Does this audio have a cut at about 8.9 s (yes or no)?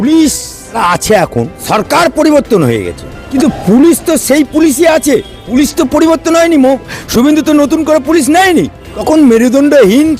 yes